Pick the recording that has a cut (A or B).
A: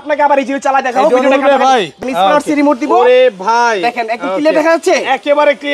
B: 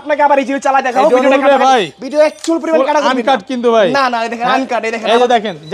A